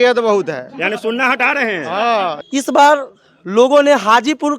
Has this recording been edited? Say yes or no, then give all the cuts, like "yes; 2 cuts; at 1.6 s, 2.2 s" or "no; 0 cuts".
yes; 1 cut; at 2.4 s